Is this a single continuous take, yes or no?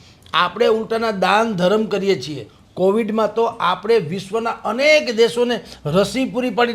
yes